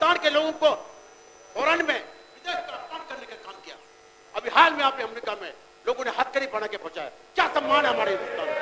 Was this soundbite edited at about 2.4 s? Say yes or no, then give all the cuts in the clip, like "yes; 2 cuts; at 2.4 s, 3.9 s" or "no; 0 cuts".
no; 0 cuts